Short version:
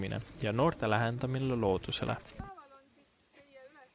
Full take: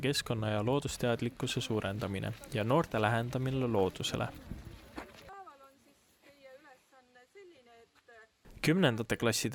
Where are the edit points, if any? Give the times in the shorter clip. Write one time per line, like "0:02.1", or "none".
0:02.3